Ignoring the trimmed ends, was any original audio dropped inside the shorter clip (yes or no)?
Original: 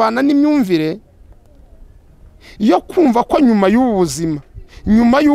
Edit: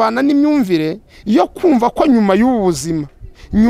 yes